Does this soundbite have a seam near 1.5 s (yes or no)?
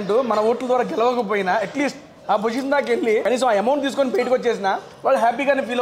no